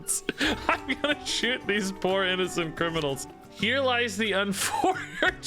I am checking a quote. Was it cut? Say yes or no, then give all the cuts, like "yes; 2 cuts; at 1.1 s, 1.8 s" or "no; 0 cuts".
yes; 1 cut; at 3.2 s